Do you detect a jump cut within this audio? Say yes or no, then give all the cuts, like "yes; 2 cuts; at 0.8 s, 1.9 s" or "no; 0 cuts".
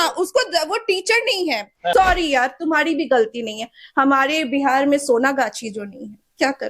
yes; 1 cut; at 1.9 s